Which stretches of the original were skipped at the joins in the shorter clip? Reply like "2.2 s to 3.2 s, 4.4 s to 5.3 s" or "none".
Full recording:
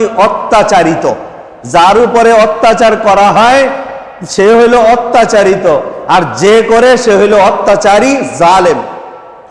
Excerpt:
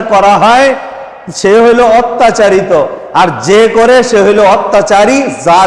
none